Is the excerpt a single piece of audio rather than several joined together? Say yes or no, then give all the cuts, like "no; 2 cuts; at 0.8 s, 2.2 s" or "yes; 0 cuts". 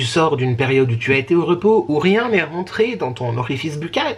yes; 0 cuts